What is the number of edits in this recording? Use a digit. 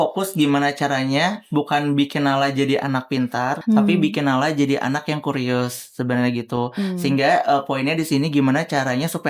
1